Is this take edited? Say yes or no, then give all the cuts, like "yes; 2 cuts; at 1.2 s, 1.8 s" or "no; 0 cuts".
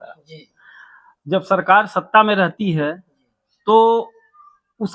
no; 0 cuts